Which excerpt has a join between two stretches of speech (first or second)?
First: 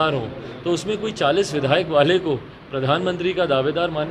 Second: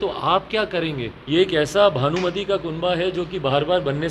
second